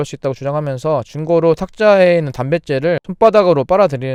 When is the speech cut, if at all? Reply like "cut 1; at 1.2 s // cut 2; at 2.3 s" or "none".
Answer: none